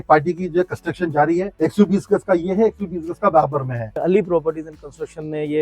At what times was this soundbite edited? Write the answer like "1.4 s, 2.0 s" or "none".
1.5 s, 4.0 s